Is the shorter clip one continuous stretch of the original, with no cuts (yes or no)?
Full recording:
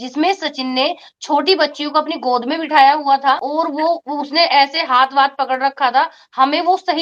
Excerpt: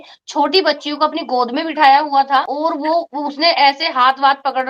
yes